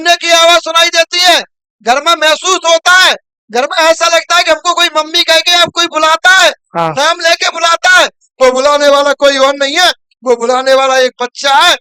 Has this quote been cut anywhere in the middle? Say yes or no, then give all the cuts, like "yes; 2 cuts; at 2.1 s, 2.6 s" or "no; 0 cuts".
no; 0 cuts